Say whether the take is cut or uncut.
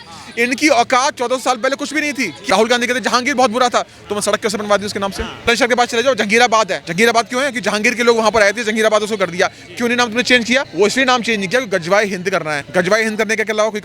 cut